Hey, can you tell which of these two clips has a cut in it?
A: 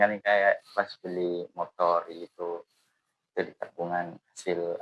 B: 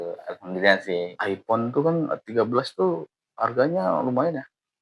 B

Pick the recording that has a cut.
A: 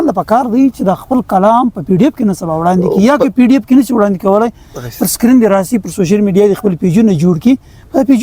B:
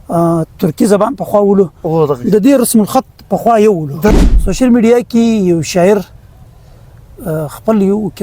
B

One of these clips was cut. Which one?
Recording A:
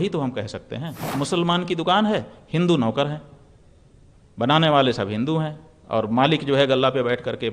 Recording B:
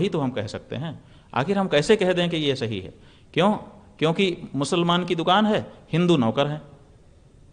A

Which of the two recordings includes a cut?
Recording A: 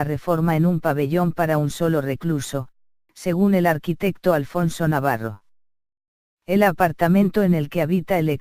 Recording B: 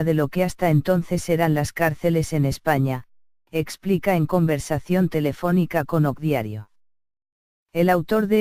B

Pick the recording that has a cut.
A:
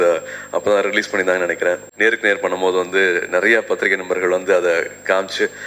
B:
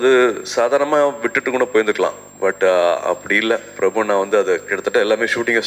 A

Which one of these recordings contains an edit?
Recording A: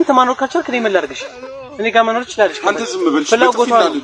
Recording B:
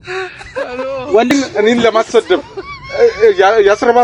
B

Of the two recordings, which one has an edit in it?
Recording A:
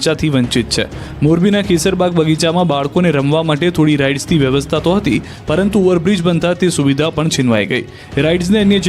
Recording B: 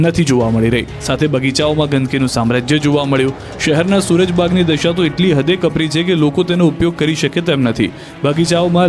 A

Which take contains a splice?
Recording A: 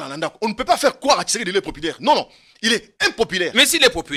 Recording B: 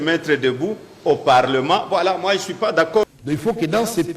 B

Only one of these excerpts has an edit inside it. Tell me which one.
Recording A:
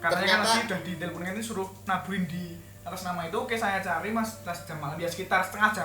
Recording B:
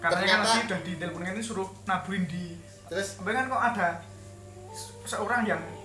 B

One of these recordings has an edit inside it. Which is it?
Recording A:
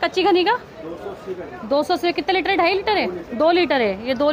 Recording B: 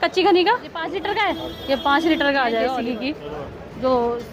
B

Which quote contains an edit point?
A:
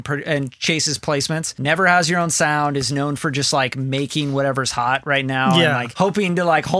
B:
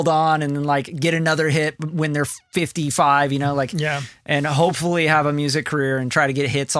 A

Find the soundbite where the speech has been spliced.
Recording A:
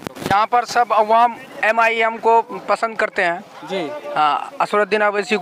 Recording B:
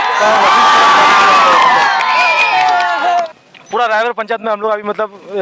B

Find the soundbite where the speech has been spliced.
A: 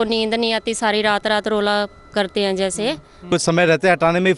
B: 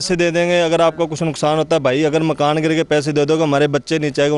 A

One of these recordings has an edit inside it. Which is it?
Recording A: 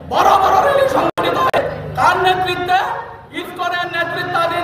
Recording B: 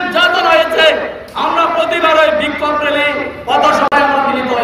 A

